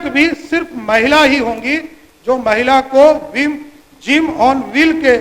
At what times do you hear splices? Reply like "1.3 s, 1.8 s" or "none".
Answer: none